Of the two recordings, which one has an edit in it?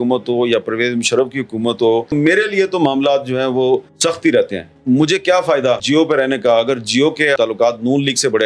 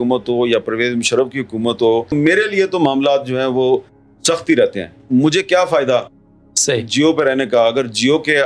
first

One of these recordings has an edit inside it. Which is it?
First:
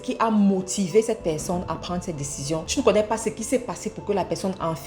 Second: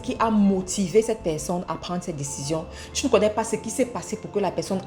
first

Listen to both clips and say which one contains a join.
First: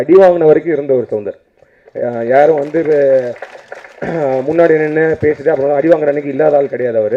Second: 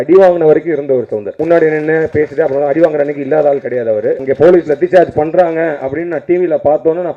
second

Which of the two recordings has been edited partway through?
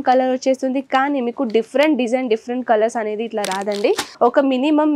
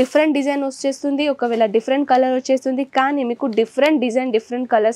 first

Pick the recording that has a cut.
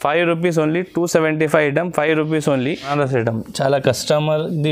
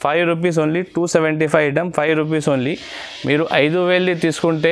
first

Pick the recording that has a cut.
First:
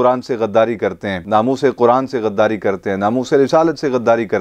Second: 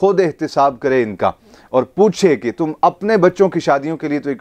first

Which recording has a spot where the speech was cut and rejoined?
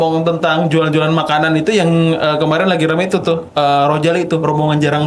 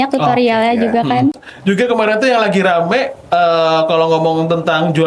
second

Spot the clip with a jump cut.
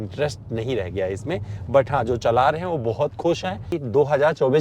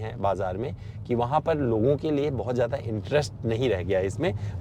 first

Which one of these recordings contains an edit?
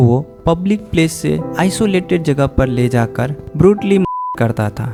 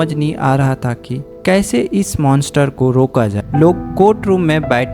second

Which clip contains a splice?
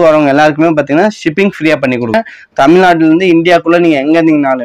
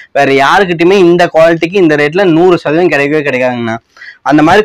first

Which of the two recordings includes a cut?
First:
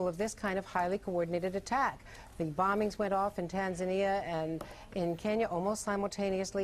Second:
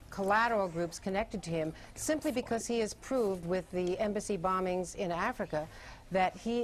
first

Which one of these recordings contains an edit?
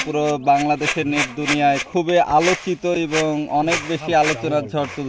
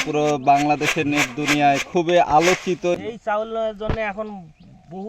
second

